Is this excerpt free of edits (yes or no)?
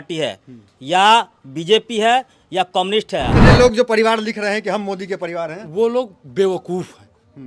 no